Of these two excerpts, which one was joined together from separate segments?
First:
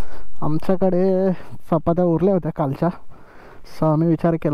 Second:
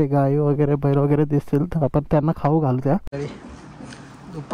second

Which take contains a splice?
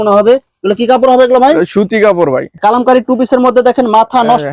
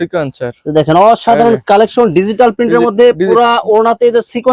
first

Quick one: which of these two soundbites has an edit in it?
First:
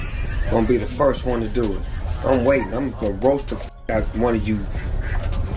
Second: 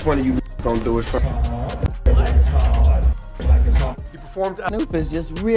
second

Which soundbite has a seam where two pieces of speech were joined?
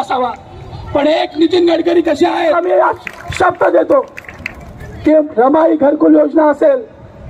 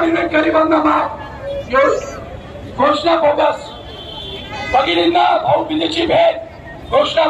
first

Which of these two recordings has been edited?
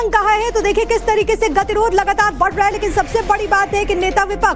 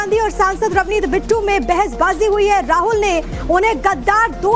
second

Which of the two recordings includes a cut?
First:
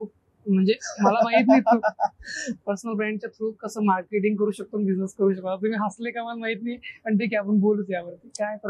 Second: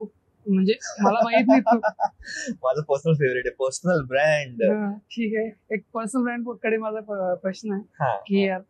first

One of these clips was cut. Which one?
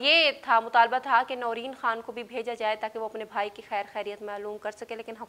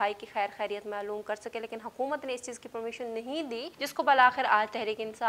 second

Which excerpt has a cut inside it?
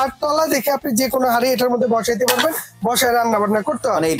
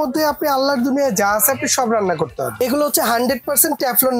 second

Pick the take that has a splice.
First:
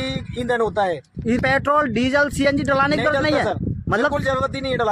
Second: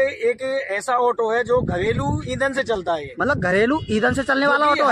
first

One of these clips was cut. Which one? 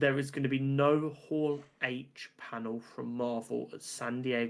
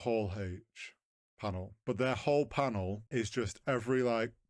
second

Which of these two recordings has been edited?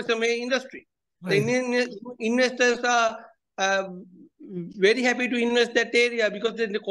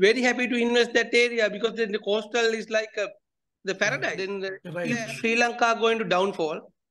second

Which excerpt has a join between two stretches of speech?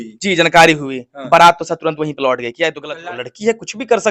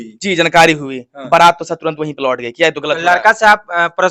first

